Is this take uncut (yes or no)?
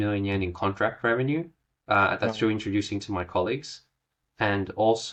yes